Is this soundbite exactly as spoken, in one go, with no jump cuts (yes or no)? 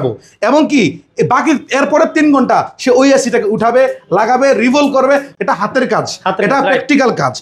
no